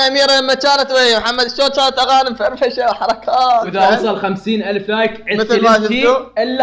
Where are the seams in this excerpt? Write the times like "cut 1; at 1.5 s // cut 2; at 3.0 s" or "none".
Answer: cut 1; at 3.7 s